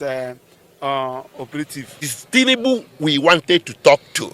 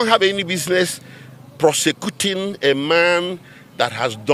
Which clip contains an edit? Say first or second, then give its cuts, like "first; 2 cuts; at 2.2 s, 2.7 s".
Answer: first; 1 cut; at 2.1 s